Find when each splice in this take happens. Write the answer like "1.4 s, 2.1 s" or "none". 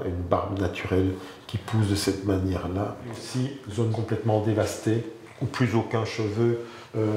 3.2 s

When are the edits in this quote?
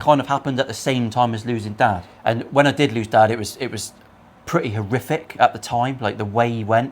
2.1 s

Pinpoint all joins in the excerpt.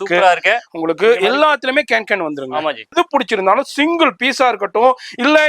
2.9 s

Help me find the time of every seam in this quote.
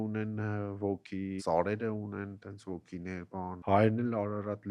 1.4 s, 3.6 s

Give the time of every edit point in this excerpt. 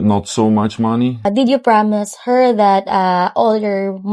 1.2 s

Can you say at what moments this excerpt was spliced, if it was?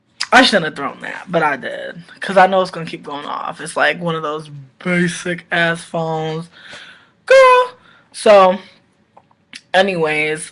none

